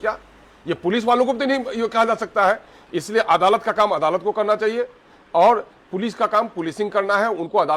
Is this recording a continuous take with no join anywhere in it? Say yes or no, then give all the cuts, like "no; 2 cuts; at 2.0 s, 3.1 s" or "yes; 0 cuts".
yes; 0 cuts